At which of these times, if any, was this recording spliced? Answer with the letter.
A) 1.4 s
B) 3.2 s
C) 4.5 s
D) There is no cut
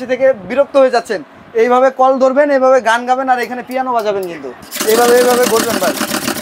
C